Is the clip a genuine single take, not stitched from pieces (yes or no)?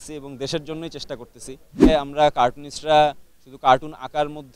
no